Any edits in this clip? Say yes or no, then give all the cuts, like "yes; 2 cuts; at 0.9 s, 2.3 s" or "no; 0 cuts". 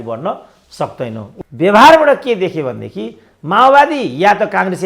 yes; 1 cut; at 1.3 s